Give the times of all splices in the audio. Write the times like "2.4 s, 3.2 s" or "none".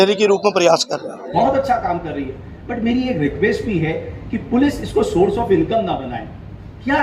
1.2 s